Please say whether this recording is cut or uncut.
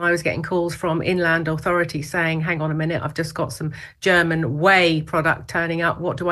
uncut